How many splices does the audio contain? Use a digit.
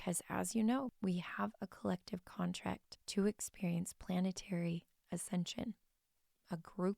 2